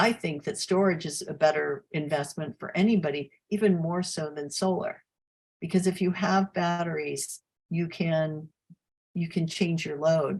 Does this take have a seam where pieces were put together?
no; 0 cuts

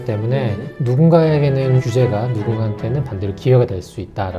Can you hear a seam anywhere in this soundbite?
yes; 1 cut; at 1.8 s

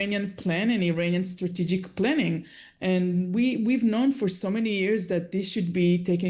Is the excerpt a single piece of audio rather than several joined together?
yes; 0 cuts

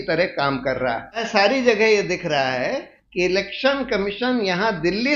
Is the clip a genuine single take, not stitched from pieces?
no; 1 cut; at 1.2 s

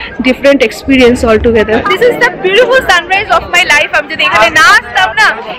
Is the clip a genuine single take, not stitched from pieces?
no; 1 cut; at 1.9 s

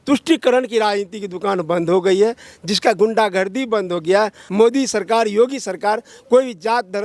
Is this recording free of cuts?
no; 1 cut; at 4.4 s

